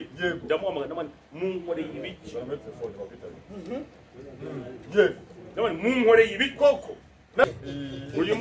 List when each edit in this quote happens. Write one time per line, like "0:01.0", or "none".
0:07.4

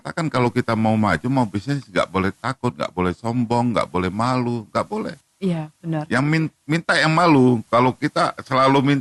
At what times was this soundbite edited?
none

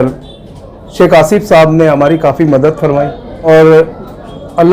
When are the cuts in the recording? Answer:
0:03.5

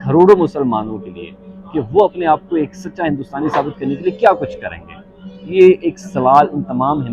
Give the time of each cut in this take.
none

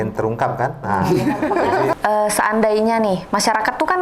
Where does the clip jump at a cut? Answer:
0:01.9

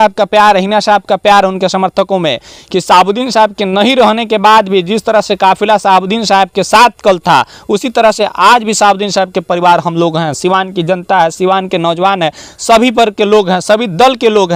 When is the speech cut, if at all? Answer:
none

